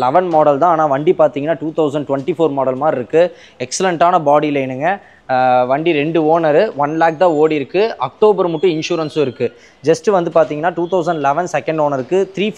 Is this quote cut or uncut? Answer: uncut